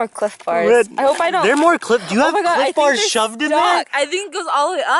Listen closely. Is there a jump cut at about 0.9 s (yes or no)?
no